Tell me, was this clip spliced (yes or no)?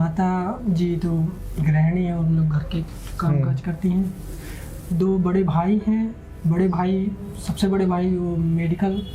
no